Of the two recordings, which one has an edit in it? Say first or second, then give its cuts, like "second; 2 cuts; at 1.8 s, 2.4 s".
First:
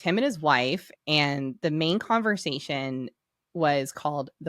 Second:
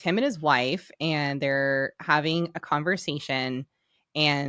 first; 1 cut; at 0.9 s